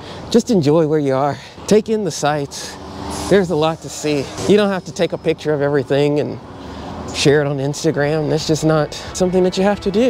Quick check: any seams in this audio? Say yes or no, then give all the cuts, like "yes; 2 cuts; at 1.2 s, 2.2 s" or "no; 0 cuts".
yes; 3 cuts; at 1.5 s, 4.3 s, 9.1 s